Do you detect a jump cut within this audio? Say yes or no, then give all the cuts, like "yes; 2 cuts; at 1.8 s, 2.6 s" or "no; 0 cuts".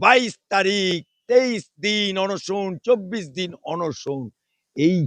no; 0 cuts